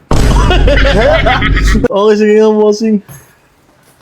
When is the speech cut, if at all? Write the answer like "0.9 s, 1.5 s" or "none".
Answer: 1.9 s